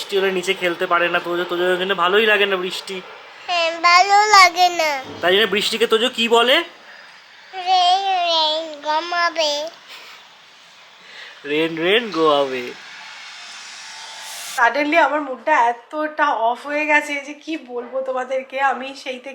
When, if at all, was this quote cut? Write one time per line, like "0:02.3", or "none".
none

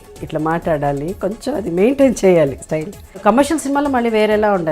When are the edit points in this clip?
0:03.2

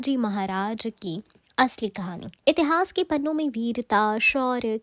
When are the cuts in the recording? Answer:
0:01.4
0:02.3

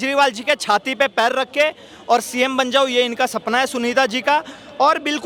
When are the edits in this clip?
none

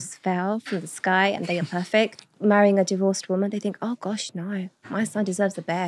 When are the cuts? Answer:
0:02.3

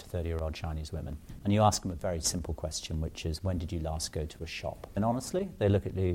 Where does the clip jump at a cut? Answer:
0:01.2
0:05.0

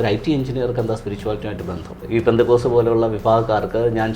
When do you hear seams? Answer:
0:02.0

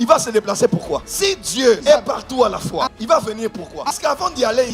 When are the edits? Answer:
0:01.1

